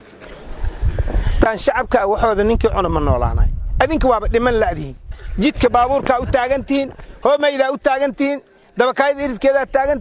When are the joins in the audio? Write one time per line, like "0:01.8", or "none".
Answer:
0:01.5